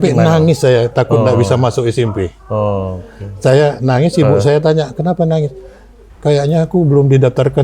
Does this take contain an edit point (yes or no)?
no